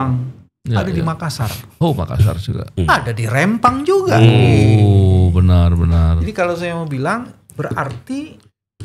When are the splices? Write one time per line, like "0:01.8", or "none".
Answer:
none

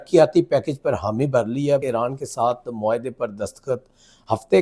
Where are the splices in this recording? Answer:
0:01.9

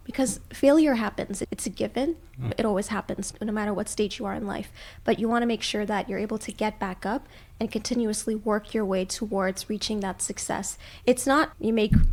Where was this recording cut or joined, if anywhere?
none

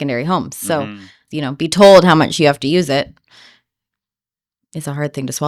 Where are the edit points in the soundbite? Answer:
none

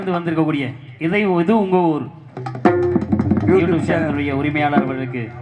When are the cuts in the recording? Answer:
none

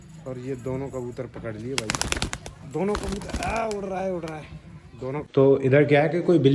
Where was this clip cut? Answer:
0:05.2

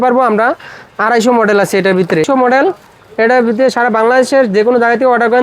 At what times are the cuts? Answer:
0:02.3

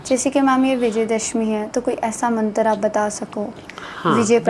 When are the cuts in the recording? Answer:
none

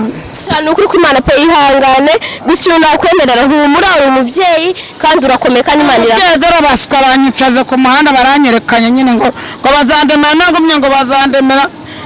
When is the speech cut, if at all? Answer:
none

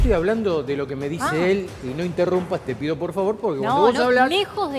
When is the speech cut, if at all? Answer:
none

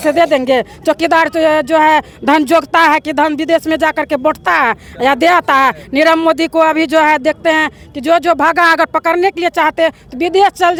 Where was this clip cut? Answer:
none

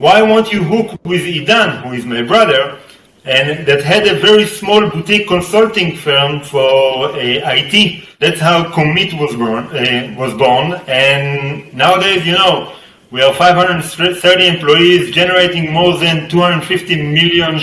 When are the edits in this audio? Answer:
0:08.0

